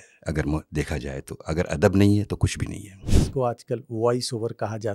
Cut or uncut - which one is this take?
cut